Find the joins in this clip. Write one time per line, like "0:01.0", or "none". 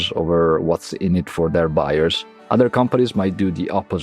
0:02.3